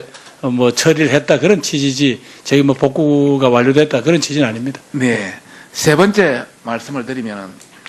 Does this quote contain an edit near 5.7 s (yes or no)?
no